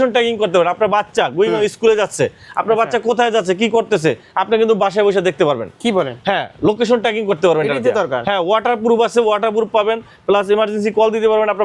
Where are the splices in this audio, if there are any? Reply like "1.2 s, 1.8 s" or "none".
none